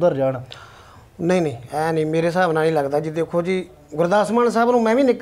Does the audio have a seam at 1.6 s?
no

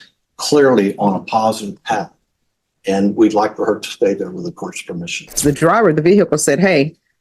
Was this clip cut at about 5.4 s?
yes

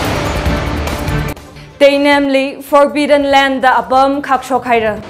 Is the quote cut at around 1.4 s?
yes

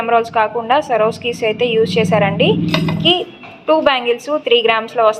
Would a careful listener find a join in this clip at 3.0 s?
yes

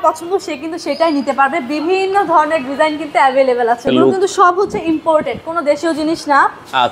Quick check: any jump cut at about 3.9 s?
yes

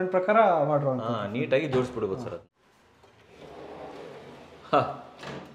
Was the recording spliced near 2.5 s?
yes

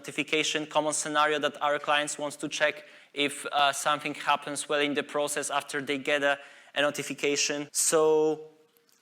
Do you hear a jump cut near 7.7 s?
yes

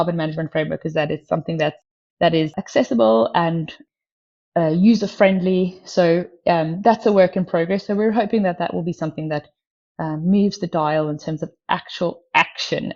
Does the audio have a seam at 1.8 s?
yes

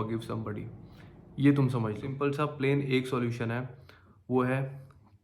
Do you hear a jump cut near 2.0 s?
yes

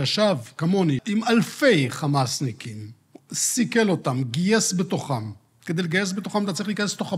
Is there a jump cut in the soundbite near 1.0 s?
yes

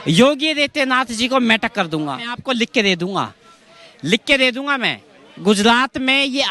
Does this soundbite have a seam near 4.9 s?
no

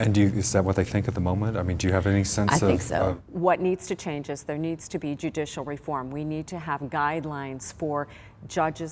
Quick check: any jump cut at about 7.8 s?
no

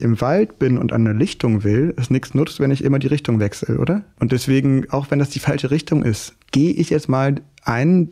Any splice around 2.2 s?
no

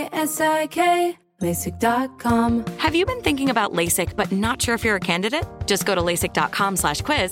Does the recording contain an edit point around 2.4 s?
yes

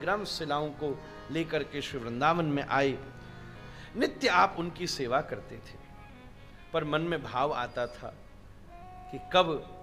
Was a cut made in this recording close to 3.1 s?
no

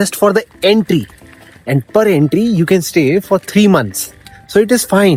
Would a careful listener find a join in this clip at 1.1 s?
no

